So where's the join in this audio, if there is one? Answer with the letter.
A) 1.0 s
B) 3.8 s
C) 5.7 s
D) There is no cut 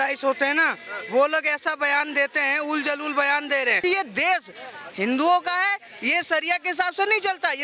B